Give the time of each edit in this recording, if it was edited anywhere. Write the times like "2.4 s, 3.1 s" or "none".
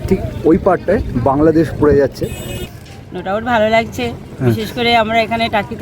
2.5 s